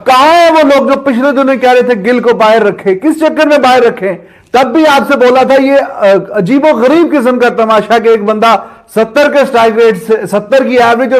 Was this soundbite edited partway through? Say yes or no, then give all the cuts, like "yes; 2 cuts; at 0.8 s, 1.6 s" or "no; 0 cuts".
no; 0 cuts